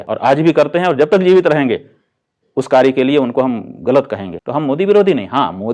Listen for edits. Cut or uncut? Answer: cut